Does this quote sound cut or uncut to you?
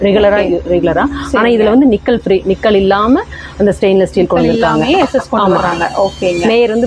uncut